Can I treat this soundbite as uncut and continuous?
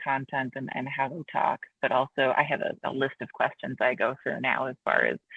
yes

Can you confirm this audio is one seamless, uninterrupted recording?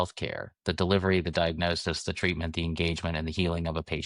yes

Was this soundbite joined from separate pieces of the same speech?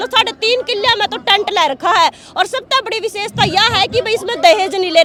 no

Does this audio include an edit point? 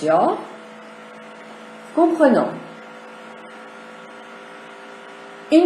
yes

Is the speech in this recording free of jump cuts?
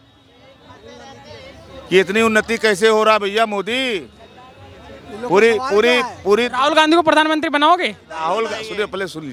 yes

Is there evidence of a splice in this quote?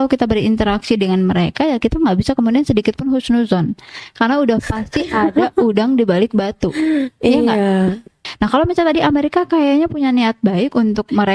yes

